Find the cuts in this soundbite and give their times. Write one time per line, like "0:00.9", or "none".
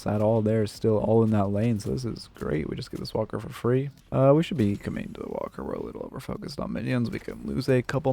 0:04.0